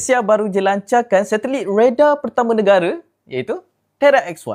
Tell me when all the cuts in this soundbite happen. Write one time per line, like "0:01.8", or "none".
none